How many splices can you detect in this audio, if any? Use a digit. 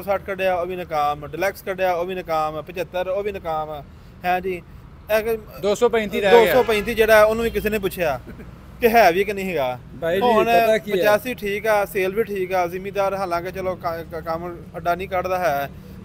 0